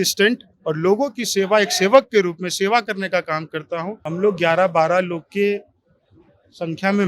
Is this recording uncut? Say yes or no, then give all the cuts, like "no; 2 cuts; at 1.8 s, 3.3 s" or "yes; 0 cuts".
no; 1 cut; at 4.0 s